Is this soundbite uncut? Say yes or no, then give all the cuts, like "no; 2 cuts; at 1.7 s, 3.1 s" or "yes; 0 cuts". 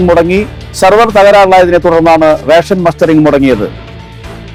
yes; 0 cuts